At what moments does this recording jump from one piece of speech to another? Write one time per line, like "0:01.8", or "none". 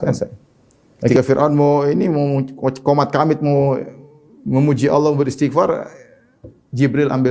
0:01.1